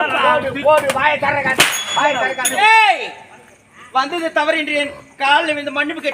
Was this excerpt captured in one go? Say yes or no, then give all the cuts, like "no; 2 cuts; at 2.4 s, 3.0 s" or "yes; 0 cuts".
no; 1 cut; at 2.6 s